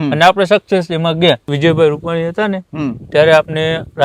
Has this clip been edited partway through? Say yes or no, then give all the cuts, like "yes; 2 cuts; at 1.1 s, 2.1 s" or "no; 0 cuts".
yes; 1 cut; at 1.5 s